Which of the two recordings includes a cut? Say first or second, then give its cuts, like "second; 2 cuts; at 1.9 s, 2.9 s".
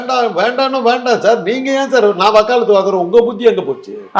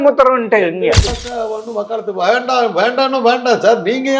second; 1 cut; at 1.2 s